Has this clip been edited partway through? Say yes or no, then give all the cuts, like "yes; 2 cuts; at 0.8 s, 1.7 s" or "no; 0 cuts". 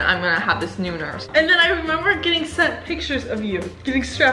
yes; 1 cut; at 1.2 s